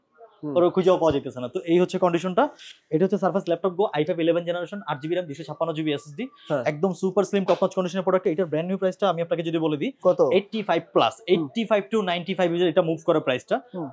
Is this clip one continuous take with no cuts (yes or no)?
yes